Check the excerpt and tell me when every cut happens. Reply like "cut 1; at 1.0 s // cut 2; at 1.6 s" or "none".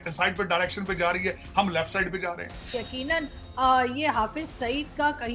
cut 1; at 2.7 s